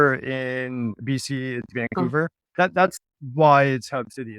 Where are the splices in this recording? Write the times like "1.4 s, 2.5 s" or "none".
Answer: 2.4 s